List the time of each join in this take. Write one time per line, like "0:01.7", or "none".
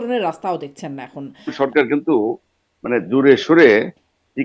0:01.5